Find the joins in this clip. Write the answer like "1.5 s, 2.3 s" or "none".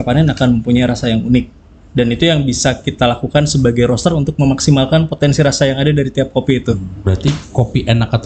6.9 s